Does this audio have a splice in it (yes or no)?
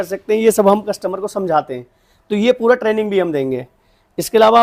no